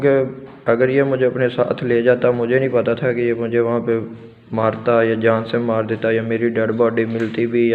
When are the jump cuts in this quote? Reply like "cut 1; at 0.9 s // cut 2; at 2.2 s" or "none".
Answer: none